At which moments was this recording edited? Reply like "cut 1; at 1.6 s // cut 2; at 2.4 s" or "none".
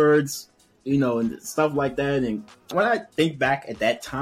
cut 1; at 2.7 s